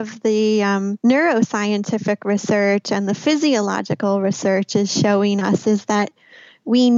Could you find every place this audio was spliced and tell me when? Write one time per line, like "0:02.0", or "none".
0:00.9